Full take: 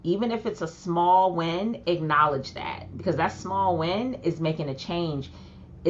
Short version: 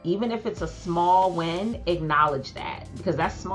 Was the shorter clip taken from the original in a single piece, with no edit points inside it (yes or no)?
yes